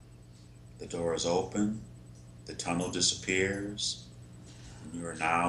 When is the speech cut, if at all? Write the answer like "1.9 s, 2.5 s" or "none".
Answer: none